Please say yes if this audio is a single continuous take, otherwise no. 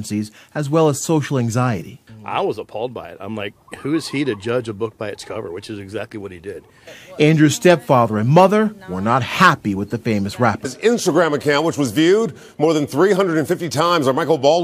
yes